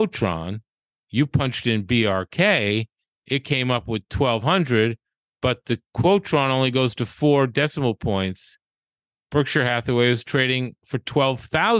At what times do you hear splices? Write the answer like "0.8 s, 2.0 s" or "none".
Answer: none